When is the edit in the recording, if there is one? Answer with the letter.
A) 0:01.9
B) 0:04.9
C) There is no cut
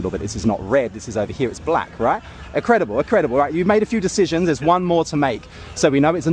B